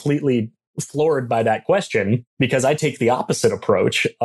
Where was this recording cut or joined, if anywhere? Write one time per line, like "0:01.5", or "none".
0:02.3